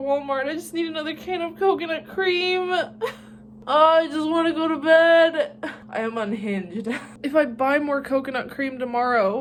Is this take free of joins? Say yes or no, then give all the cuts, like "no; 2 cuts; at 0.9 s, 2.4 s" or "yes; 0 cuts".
yes; 0 cuts